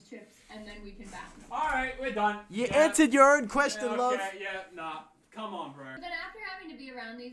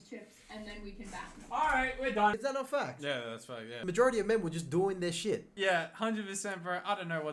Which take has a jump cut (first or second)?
second